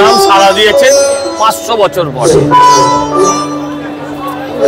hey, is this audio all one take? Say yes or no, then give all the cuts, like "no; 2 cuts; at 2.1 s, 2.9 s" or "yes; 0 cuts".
yes; 0 cuts